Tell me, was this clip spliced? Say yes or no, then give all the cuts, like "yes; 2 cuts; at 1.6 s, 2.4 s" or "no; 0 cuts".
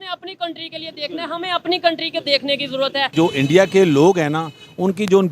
yes; 1 cut; at 3.1 s